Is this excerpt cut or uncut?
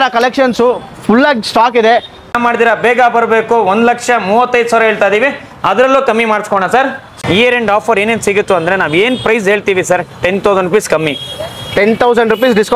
cut